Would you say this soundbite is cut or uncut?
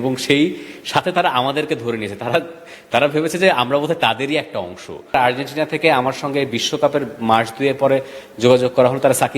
cut